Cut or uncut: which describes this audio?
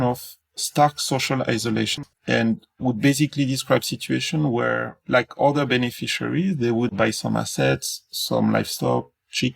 cut